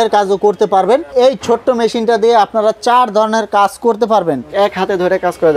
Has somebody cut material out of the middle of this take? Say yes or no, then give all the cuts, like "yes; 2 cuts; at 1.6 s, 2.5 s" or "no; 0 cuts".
yes; 2 cuts; at 1.1 s, 4.5 s